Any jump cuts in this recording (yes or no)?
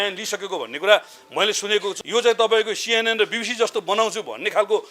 yes